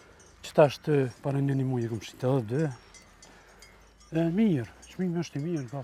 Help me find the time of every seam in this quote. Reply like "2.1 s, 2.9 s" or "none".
none